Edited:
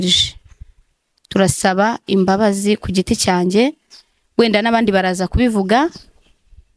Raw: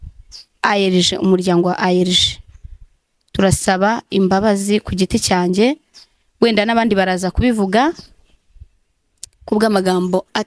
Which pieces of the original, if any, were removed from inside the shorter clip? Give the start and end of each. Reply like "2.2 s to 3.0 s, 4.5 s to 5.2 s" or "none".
none